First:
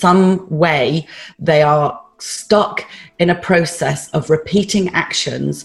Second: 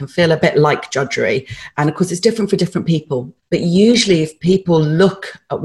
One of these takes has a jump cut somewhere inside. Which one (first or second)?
second